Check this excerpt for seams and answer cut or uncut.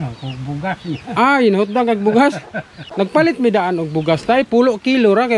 uncut